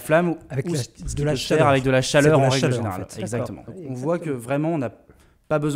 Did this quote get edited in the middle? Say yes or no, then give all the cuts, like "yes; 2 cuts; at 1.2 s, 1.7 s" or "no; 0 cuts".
yes; 1 cut; at 3.7 s